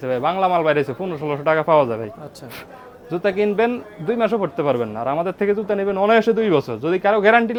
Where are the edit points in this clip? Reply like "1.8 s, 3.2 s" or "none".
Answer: none